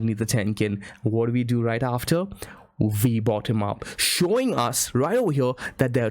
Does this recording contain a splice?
yes; 1 cut; at 4.0 s

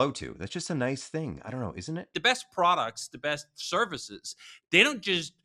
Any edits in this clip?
yes; 1 cut; at 2.2 s

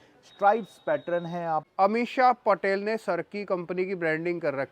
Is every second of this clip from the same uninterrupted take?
no; 1 cut; at 1.7 s

